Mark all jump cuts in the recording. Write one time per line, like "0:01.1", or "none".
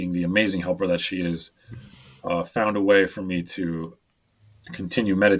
0:04.3

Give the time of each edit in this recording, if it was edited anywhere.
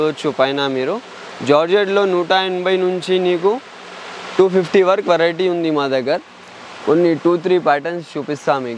none

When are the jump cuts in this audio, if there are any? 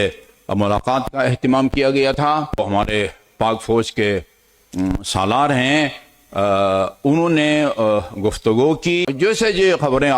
0:02.6
0:09.1

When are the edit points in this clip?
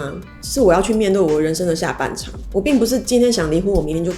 0:02.3

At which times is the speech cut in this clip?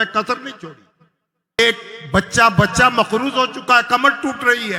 0:01.6

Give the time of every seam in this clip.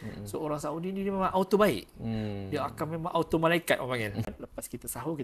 0:04.3

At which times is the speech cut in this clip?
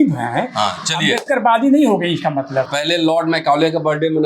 0:02.7

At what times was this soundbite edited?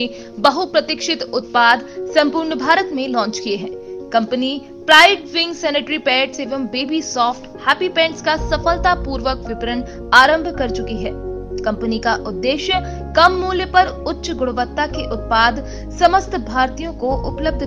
none

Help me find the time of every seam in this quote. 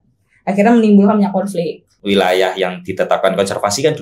0:01.8

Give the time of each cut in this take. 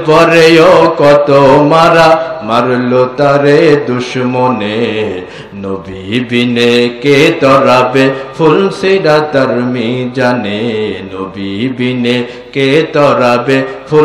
none

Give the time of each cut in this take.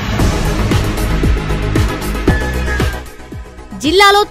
none

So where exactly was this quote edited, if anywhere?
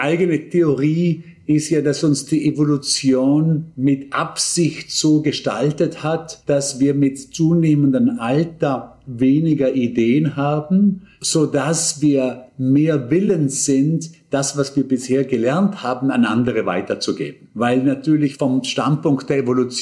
0:06.3
0:11.1
0:18.3

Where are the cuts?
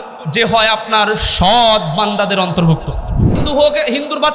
0:03.4

